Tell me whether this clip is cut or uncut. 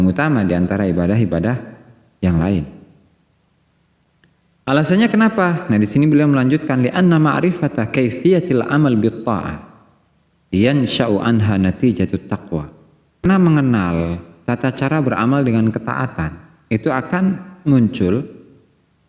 cut